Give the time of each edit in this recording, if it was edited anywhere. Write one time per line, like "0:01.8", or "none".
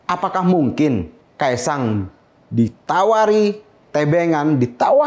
0:01.2

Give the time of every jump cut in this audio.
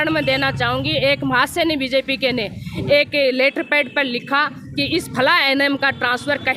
none

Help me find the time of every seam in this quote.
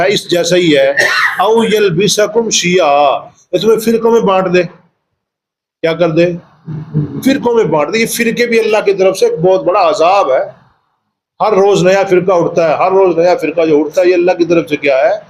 none

